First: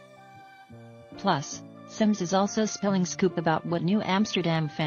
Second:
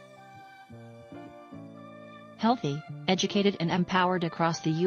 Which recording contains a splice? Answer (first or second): first